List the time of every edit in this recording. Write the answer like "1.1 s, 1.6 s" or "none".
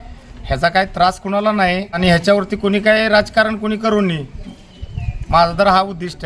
2.0 s